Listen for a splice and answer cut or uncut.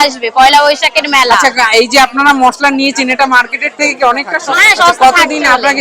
cut